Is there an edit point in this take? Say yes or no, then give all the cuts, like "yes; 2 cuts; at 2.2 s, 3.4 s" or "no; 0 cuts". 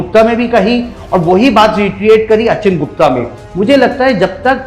no; 0 cuts